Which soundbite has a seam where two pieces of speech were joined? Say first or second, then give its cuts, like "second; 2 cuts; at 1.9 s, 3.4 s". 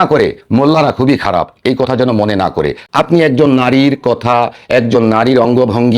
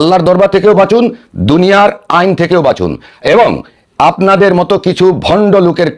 first; 1 cut; at 2.8 s